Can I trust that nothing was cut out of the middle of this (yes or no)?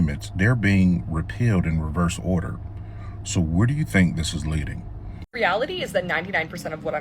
no